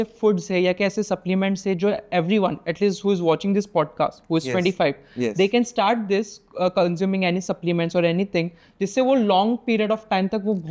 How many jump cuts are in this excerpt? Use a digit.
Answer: 0